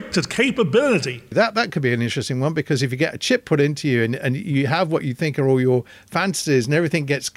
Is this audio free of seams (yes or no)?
no